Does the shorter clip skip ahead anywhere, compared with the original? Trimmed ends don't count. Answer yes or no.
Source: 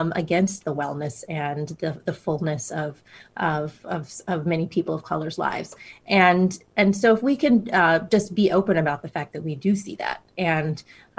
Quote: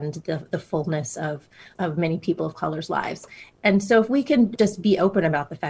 yes